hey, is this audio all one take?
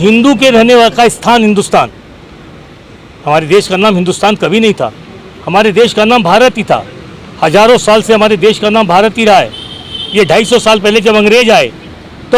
yes; 0 cuts

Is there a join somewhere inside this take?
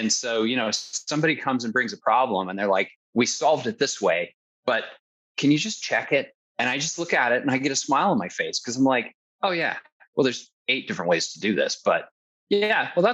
yes; 3 cuts; at 3.0 s, 5.2 s, 6.4 s

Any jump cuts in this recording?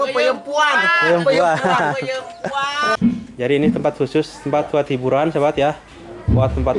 yes; 1 cut; at 3.0 s

